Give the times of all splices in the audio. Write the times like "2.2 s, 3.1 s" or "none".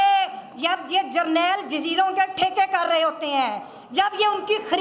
none